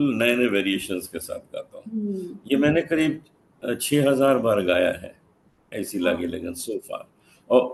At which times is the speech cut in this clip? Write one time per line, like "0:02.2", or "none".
none

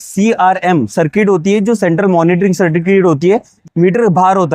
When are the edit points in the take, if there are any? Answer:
0:03.5

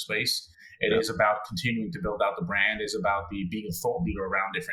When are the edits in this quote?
none

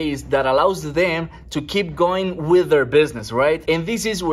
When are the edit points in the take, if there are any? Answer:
0:03.3

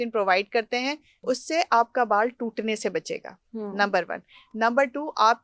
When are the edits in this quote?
0:01.2

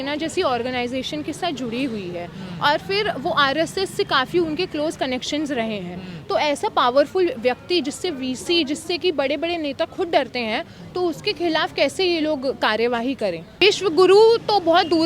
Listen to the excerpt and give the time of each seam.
0:13.6

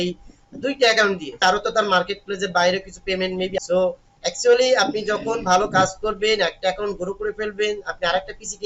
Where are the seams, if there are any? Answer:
none

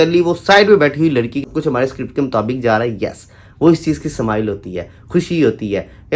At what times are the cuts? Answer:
0:01.4

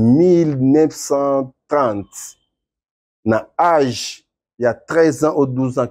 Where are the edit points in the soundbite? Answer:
none

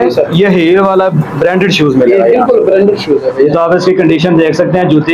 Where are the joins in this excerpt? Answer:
none

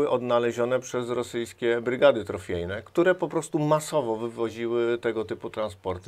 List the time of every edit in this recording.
none

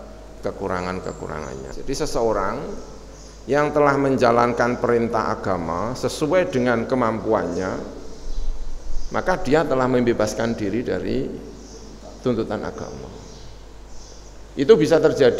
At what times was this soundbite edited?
0:01.7

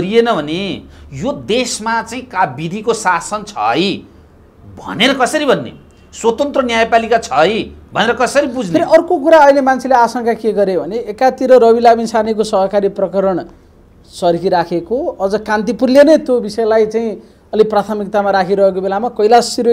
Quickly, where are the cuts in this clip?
none

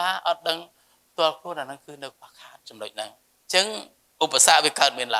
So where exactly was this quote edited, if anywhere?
0:03.3

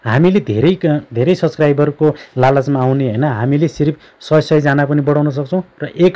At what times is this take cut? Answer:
none

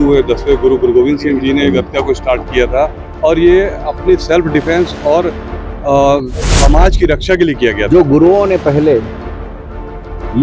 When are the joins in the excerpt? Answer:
0:07.9

